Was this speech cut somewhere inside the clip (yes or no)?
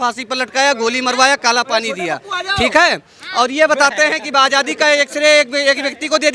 no